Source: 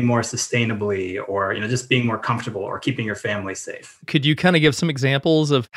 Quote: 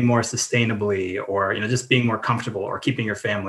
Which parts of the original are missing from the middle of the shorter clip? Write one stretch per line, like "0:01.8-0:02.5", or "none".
none